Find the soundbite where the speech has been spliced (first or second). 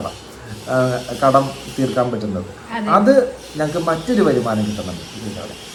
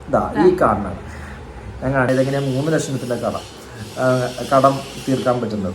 second